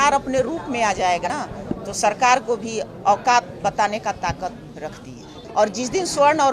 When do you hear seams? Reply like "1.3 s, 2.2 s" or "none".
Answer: 1.2 s, 5.4 s